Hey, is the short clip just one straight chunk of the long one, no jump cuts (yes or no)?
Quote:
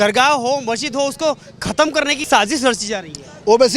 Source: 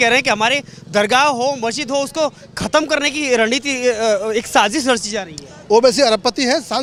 no